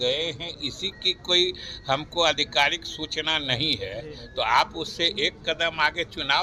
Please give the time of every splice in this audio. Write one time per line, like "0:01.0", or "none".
none